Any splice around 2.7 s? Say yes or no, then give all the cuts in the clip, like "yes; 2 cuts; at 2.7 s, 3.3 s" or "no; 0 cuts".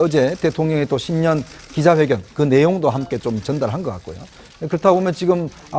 yes; 1 cut; at 2.7 s